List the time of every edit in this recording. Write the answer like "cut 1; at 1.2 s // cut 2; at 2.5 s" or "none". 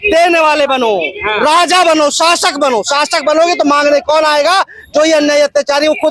none